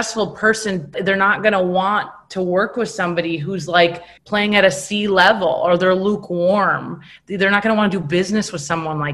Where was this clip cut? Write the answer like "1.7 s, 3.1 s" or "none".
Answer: 0.9 s, 4.1 s